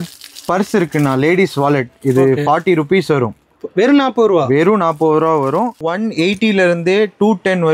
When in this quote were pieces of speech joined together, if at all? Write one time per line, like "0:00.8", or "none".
0:05.8